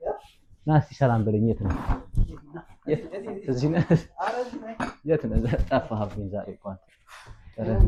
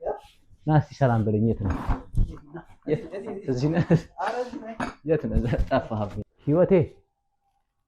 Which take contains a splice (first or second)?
second